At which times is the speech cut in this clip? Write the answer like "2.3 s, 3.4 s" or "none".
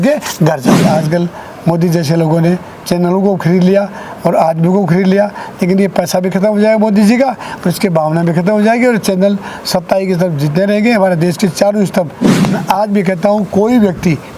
0.9 s, 12.4 s